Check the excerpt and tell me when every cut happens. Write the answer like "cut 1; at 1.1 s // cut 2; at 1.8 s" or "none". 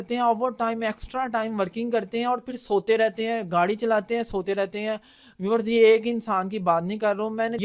none